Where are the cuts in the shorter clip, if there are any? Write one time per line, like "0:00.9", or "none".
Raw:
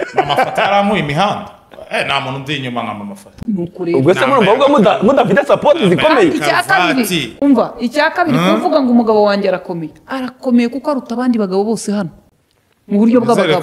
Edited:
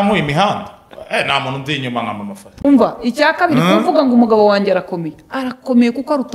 0:02.5